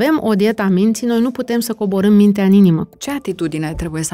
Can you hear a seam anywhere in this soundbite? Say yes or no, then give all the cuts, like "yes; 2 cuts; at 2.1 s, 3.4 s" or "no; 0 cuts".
yes; 1 cut; at 2.9 s